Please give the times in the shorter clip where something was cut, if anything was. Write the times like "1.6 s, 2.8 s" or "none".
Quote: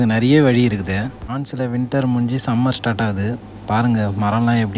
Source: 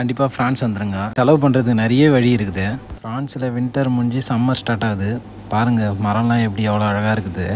1.2 s